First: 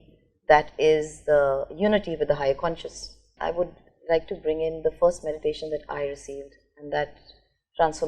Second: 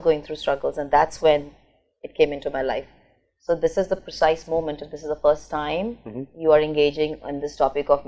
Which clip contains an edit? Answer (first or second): first